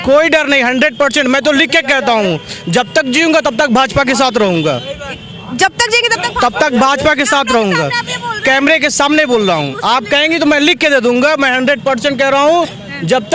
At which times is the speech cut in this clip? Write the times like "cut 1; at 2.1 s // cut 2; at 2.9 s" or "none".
none